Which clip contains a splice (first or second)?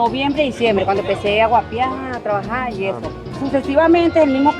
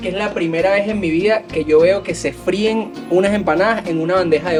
first